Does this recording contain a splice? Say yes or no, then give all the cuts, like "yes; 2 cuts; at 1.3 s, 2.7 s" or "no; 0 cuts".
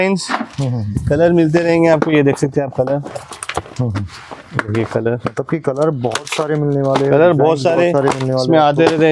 no; 0 cuts